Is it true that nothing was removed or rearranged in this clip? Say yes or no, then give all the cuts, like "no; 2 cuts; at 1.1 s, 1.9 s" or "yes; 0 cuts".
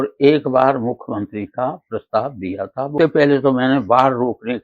no; 1 cut; at 2.9 s